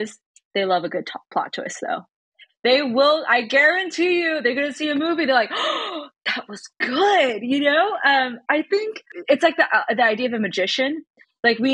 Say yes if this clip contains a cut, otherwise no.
yes